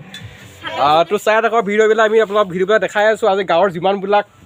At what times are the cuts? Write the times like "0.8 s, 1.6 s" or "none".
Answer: none